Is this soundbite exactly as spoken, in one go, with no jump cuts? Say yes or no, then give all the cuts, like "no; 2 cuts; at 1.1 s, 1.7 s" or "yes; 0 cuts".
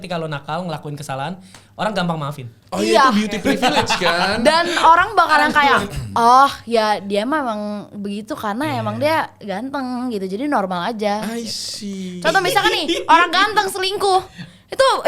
yes; 0 cuts